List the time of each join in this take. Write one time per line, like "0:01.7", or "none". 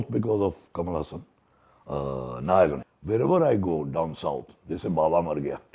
0:02.8